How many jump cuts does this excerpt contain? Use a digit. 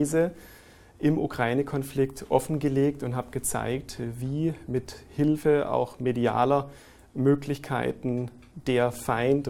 0